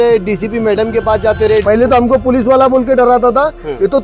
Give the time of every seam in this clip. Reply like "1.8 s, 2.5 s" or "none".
1.6 s